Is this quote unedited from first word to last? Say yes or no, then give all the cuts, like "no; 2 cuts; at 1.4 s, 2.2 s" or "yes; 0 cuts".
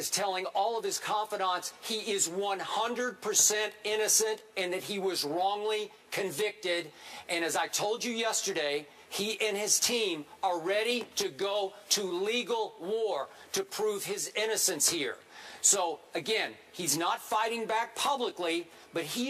yes; 0 cuts